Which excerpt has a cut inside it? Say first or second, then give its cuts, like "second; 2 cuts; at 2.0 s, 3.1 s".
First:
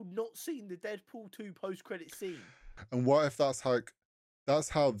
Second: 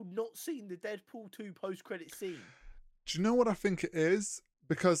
first; 1 cut; at 2.8 s